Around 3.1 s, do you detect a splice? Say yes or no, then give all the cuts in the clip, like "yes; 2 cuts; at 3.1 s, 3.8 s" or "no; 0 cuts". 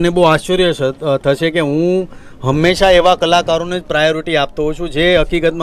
no; 0 cuts